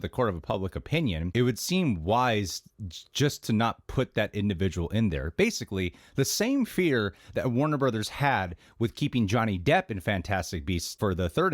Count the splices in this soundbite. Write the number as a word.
one